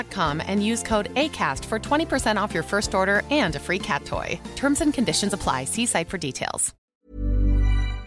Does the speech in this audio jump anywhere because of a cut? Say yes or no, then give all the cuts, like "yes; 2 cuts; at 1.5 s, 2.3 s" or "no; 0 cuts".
yes; 1 cut; at 6.8 s